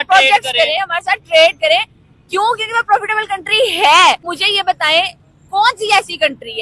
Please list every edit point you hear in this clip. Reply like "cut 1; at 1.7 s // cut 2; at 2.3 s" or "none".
cut 1; at 4.3 s